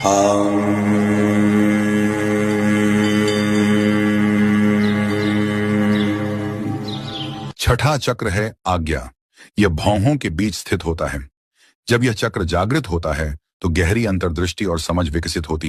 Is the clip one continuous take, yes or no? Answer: yes